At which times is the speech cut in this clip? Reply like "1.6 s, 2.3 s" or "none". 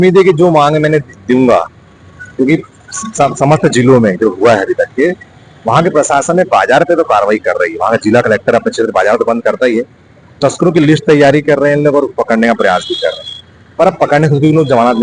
none